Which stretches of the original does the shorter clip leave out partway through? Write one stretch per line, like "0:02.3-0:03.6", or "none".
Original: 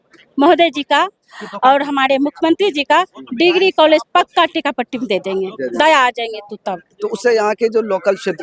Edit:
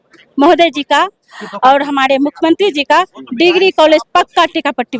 none